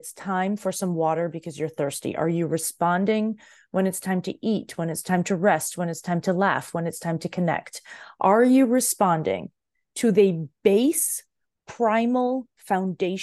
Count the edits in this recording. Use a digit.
0